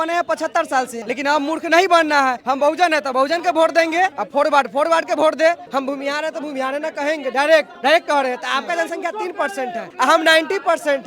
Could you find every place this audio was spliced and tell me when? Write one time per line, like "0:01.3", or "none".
0:01.0
0:02.4
0:04.2
0:05.6
0:07.7
0:09.9